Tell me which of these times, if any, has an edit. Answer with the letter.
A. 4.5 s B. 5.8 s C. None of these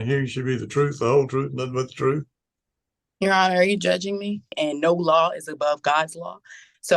A